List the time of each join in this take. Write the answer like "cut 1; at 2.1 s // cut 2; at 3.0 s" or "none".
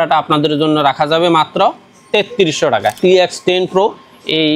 cut 1; at 3.0 s